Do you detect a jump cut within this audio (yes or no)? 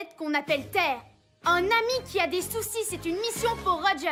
no